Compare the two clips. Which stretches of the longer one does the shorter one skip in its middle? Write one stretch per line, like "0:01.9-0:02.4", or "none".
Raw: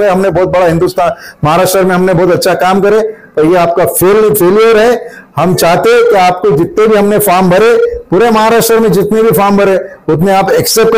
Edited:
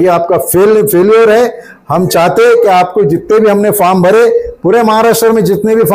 none